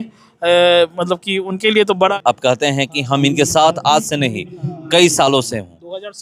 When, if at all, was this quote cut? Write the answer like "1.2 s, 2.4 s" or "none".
2.1 s